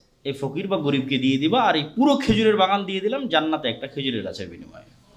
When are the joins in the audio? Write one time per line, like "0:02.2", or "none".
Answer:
none